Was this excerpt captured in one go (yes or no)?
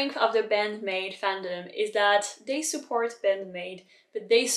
yes